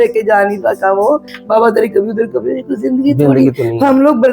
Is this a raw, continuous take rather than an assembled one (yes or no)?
no